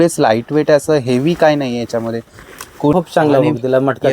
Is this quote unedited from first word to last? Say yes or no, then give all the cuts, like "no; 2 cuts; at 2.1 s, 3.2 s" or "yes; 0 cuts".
no; 1 cut; at 2.9 s